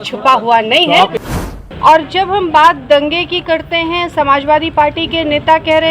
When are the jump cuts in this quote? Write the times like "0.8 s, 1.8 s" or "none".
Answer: 1.2 s